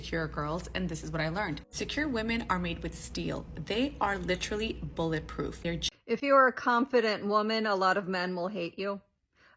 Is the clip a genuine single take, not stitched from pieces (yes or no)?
no